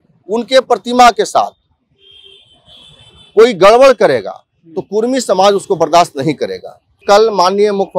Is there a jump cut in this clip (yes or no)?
yes